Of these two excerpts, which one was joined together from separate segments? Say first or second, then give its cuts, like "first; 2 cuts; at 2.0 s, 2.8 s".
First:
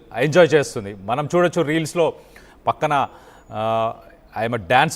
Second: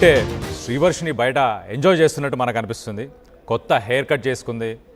first; 2 cuts; at 1.1 s, 1.9 s